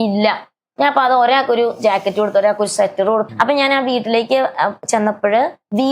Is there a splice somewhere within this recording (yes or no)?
yes